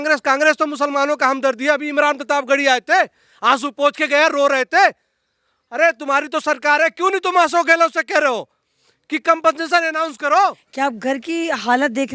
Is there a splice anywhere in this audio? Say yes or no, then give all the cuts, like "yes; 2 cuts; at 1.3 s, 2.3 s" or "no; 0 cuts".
yes; 1 cut; at 10.6 s